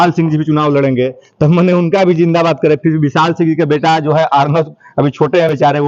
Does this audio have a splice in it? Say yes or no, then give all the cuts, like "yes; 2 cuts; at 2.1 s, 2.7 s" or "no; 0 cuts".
no; 0 cuts